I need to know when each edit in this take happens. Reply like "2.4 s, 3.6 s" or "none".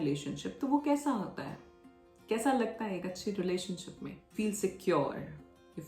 4.2 s